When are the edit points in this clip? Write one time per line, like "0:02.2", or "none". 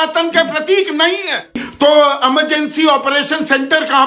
0:01.6